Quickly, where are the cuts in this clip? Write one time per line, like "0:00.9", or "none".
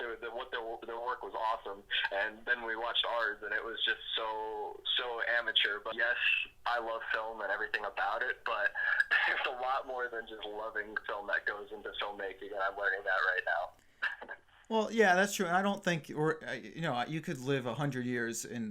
0:05.9